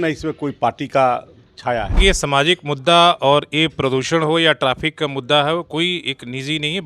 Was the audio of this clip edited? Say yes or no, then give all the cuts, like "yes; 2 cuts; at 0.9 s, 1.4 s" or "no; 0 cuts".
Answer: yes; 1 cut; at 2.0 s